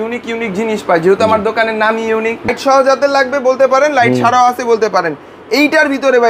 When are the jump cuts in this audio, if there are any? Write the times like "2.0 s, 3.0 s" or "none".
2.5 s

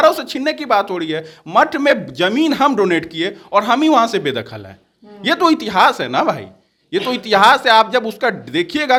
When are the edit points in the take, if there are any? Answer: none

